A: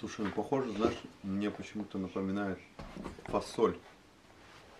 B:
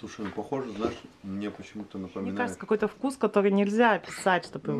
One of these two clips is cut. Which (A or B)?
B